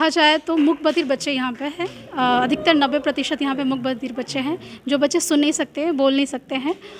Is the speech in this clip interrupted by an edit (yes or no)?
no